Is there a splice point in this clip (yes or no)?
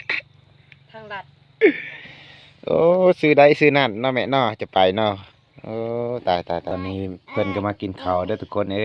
yes